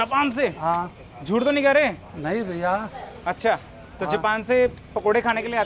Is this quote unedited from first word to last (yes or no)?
yes